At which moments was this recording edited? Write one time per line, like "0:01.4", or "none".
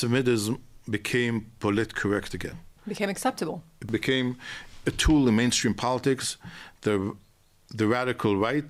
0:02.8
0:03.8